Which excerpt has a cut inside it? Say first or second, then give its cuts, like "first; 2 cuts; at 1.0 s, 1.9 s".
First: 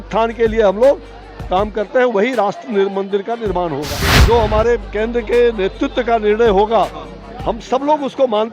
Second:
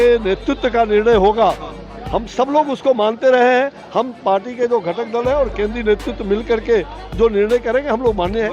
first; 1 cut; at 4.1 s